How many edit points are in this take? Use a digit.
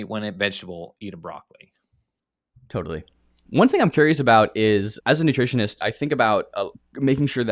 0